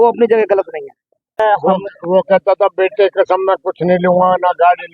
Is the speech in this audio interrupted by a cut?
yes; 1 cut; at 1.4 s

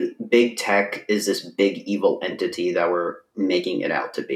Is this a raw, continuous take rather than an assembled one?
yes; 0 cuts

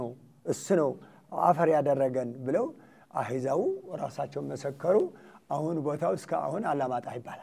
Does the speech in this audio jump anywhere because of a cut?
no; 0 cuts

